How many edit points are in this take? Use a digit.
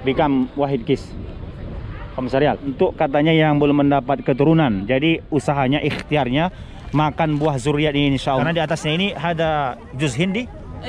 2